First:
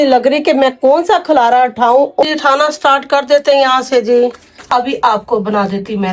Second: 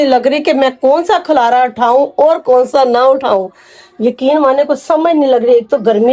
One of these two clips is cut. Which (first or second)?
first